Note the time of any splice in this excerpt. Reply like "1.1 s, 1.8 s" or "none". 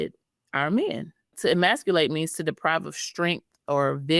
1.3 s

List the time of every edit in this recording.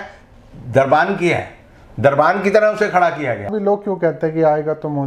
3.5 s

